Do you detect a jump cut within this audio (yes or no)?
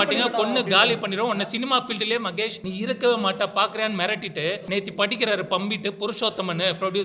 yes